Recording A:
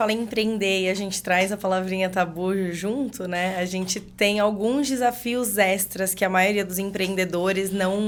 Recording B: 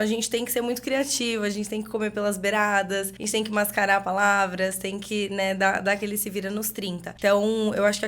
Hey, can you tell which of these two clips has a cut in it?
B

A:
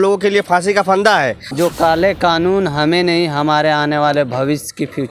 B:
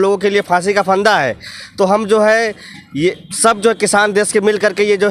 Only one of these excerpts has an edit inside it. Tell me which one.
A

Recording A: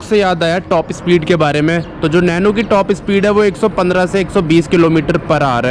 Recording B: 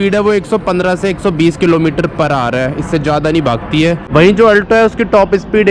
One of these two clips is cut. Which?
B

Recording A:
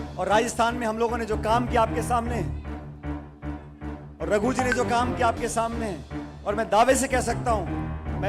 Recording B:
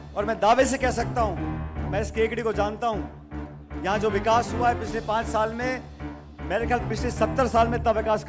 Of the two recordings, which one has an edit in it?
A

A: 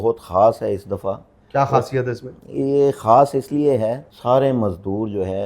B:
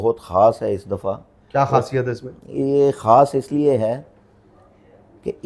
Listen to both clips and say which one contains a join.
A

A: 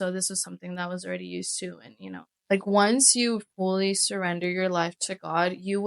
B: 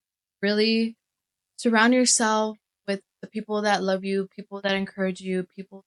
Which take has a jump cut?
A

